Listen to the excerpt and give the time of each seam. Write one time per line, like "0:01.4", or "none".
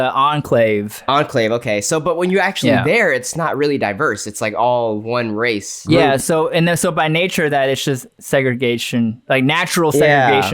0:05.7